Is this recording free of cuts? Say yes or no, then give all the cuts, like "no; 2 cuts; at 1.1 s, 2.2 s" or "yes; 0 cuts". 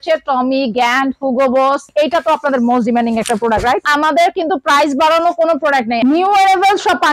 no; 2 cuts; at 1.9 s, 6.0 s